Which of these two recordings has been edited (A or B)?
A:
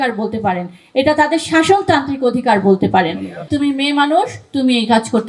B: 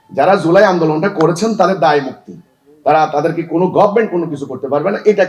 A